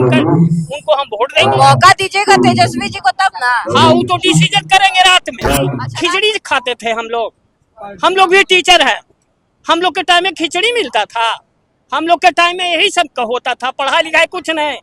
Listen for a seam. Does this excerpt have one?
yes; 1 cut; at 5.9 s

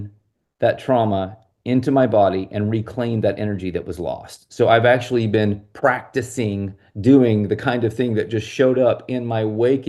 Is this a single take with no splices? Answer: yes; 0 cuts

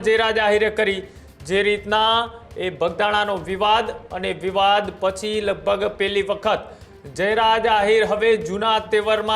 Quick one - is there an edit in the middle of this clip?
no; 0 cuts

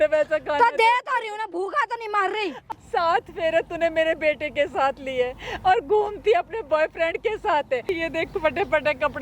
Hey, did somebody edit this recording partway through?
yes; 2 cuts; at 2.6 s, 7.8 s

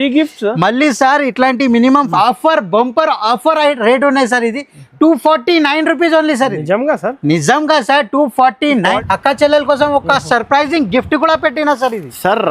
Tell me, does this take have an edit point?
yes; 2 cuts; at 2.1 s, 9.0 s

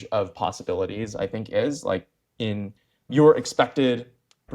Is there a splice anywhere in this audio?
no; 0 cuts

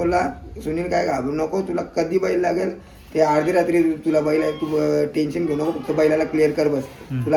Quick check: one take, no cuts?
yes; 0 cuts

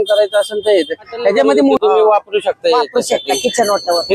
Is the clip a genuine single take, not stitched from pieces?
no; 1 cut; at 1.8 s

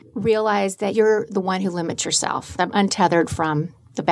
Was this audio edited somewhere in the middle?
yes; 2 cuts; at 0.9 s, 2.5 s

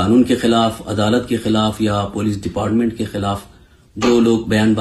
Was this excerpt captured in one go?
yes; 0 cuts

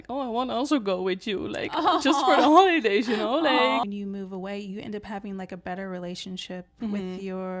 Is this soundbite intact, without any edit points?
no; 1 cut; at 3.8 s

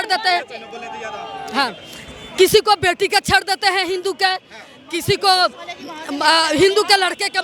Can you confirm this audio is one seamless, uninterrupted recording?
yes; 0 cuts

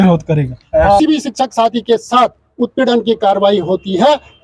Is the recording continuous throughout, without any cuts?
no; 1 cut; at 1.0 s

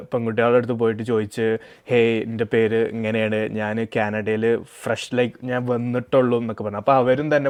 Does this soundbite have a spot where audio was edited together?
no; 0 cuts

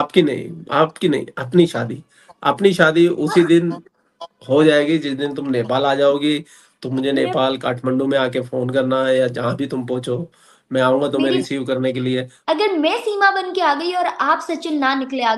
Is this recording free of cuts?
no; 1 cut; at 12.3 s

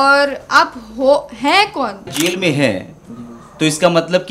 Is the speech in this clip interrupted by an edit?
yes; 1 cut; at 2.1 s

